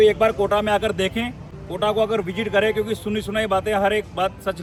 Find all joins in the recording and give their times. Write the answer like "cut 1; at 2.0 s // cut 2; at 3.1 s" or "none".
none